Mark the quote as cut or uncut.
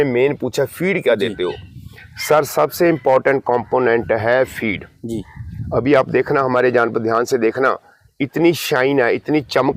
uncut